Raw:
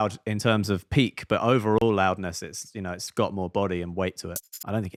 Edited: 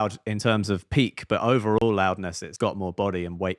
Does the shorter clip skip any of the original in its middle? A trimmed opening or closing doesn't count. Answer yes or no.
yes